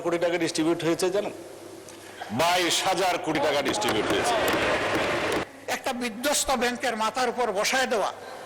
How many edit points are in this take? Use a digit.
1